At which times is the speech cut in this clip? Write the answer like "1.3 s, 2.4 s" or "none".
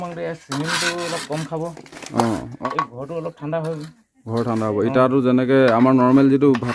2.5 s